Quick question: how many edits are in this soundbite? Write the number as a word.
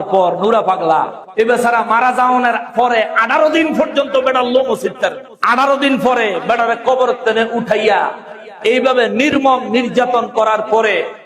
zero